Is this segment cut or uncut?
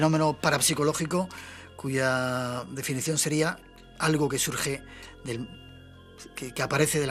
uncut